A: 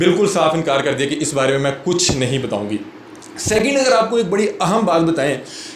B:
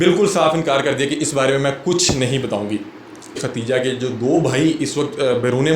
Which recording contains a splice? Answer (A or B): B